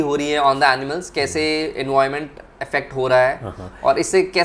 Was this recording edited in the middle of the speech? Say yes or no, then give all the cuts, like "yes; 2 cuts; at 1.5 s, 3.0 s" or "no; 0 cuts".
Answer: no; 0 cuts